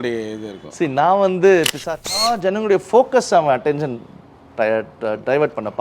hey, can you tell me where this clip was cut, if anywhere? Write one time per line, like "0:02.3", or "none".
0:02.3